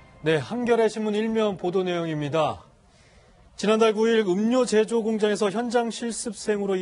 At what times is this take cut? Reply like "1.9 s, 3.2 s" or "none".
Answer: none

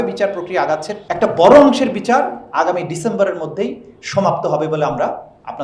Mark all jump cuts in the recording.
1.0 s

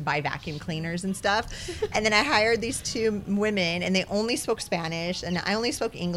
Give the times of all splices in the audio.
none

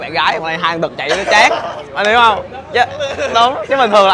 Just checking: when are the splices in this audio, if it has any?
none

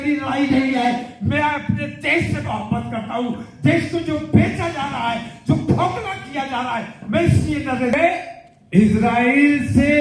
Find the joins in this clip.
7.9 s

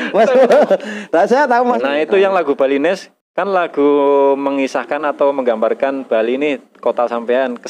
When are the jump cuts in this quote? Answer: 1.9 s

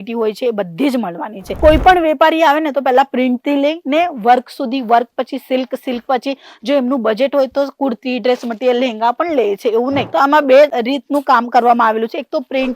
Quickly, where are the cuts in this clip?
1.5 s, 10.0 s

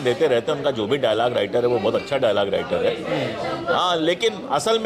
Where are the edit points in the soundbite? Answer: none

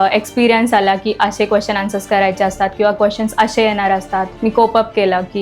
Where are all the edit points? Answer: 4.3 s

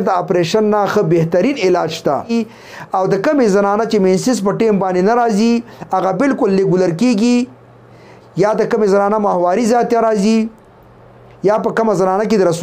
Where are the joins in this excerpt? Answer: 2.3 s

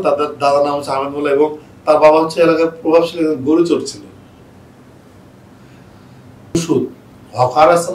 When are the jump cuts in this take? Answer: 6.6 s

